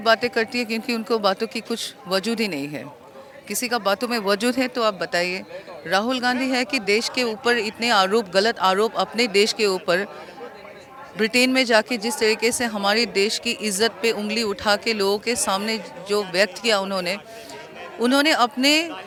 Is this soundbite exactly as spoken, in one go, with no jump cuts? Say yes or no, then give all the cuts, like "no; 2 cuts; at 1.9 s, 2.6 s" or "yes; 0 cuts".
yes; 0 cuts